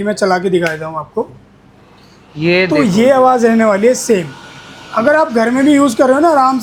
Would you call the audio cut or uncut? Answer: uncut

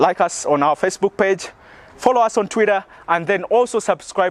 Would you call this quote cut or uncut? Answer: uncut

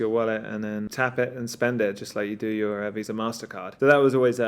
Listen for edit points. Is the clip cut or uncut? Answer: cut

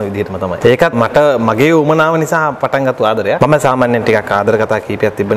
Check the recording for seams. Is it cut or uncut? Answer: cut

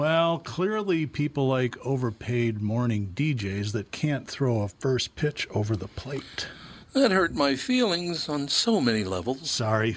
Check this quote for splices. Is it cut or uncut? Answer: uncut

